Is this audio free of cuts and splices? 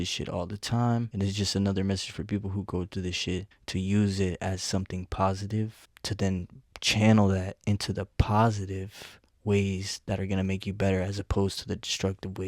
yes; 0 cuts

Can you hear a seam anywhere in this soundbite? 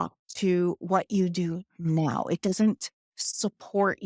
no; 0 cuts

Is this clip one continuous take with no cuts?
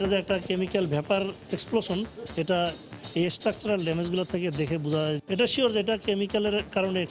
yes; 0 cuts

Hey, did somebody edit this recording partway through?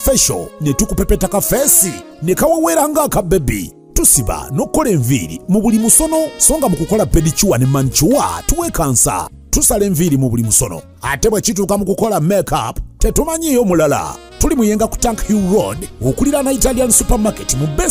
no; 0 cuts

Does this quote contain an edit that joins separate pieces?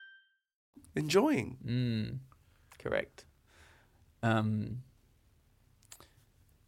no; 0 cuts

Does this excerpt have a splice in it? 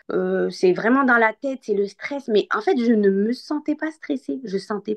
no; 0 cuts

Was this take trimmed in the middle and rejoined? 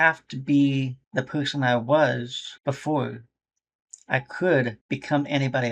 yes; 3 cuts; at 1.0 s, 2.4 s, 4.8 s

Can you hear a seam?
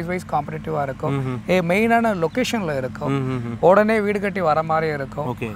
no; 0 cuts

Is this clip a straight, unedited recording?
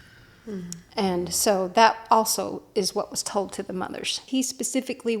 no; 1 cut; at 4.2 s

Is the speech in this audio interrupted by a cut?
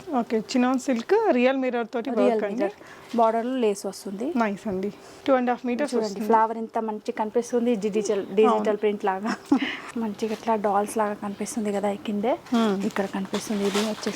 yes; 2 cuts; at 5.1 s, 9.8 s

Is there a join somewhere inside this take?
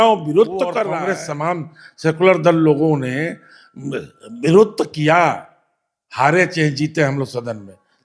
yes; 1 cut; at 0.9 s

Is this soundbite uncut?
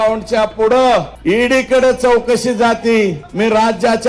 no; 2 cuts; at 1.1 s, 3.2 s

